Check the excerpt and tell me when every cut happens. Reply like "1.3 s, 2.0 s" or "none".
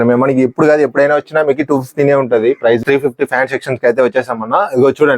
2.8 s